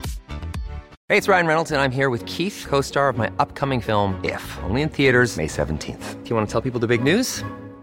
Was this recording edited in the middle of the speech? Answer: yes; 1 cut; at 0.9 s

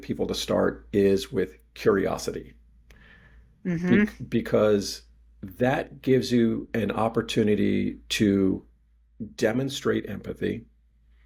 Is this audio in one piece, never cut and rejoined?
yes; 0 cuts

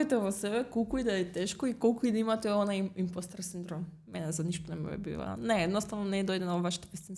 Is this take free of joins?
yes; 0 cuts

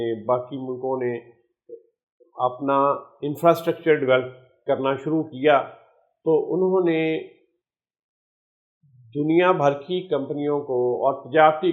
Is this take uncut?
yes; 0 cuts

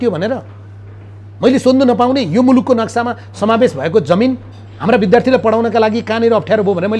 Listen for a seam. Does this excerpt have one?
no; 0 cuts

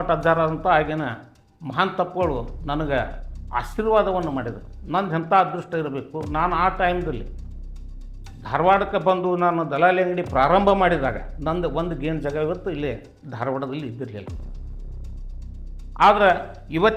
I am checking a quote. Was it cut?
no; 0 cuts

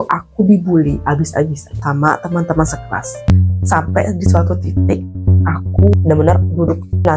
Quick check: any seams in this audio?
yes; 1 cut; at 3.3 s

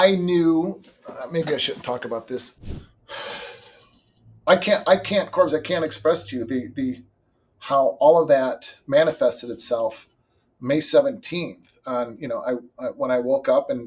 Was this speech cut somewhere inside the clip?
yes; 1 cut; at 2.5 s

